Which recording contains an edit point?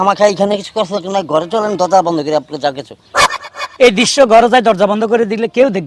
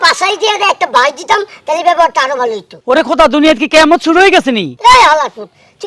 second; 2 cuts; at 2.7 s, 4.7 s

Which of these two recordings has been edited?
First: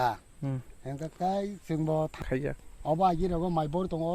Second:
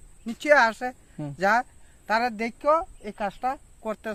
first; 1 cut; at 2.2 s

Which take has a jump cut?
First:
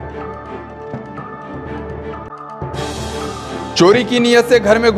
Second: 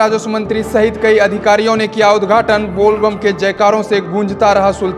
first; 1 cut; at 3.7 s

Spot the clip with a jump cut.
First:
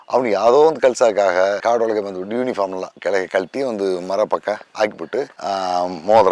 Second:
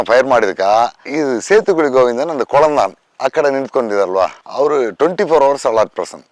second; 2 cuts; at 1.0 s, 4.4 s

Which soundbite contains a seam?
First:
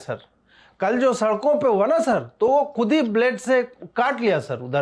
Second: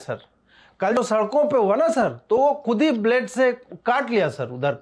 second; 1 cut; at 1.0 s

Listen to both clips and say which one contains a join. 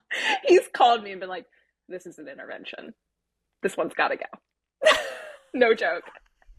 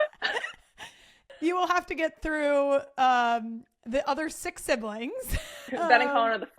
second; 2 cuts; at 1.2 s, 5.7 s

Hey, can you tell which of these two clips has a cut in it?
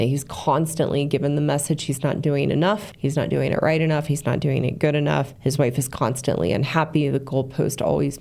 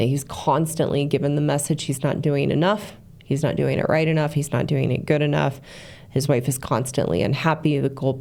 first; 2 cuts; at 2.8 s, 5.3 s

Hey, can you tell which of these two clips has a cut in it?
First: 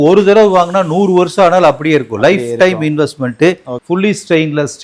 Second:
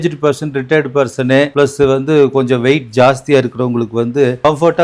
first; 1 cut; at 3.8 s

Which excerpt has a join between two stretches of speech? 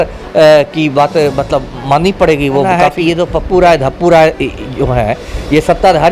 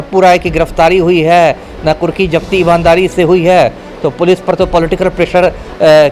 first; 1 cut; at 2.6 s

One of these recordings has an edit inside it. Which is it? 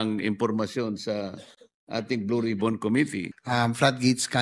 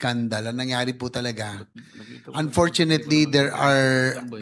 first; 1 cut; at 3.3 s

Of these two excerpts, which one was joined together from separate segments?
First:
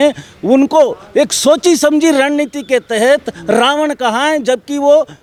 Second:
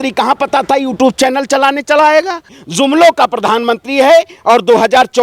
second; 1 cut; at 2.6 s

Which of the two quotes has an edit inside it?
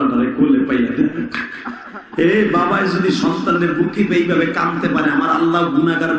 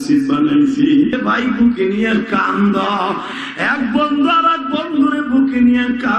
second; 1 cut; at 1.2 s

